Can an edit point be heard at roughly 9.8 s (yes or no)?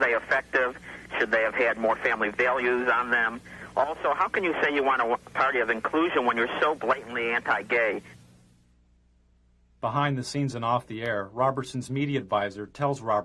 yes